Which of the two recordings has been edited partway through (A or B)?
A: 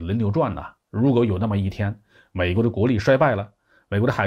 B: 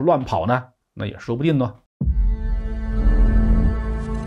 B